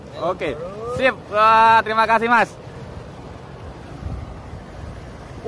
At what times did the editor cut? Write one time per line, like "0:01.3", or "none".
0:03.8